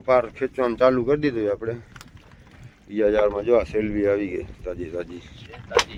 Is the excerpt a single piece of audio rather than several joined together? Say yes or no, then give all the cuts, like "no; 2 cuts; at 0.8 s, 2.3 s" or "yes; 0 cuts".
yes; 0 cuts